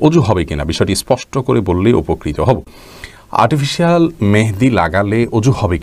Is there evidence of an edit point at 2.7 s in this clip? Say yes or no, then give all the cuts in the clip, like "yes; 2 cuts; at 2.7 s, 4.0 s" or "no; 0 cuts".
no; 0 cuts